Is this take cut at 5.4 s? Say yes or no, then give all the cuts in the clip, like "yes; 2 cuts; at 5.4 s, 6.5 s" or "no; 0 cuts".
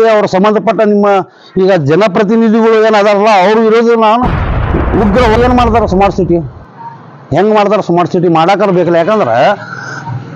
yes; 1 cut; at 5.4 s